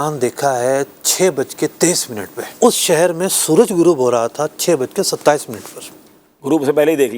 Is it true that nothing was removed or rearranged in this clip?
no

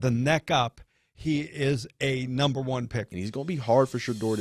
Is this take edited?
yes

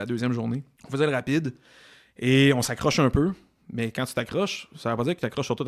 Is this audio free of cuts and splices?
yes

